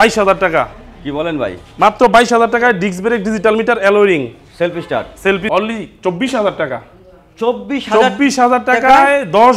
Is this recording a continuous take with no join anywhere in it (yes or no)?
no